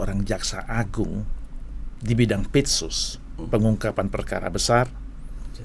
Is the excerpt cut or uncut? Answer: uncut